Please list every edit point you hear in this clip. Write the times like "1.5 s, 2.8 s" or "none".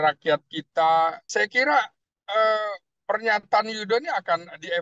1.2 s